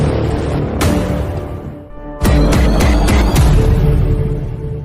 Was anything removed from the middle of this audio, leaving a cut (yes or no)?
yes